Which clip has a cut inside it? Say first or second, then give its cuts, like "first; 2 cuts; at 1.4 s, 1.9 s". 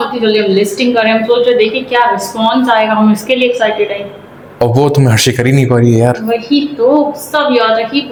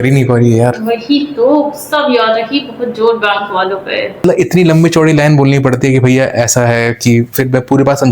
second; 1 cut; at 4.2 s